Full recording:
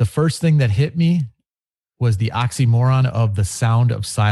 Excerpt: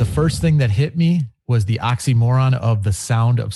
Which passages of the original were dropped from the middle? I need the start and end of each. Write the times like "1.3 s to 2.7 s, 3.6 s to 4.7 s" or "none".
1.4 s to 1.9 s